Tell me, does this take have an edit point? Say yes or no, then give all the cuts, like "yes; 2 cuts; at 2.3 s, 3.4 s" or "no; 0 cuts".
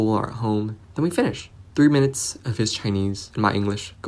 yes; 2 cuts; at 1.1 s, 3.2 s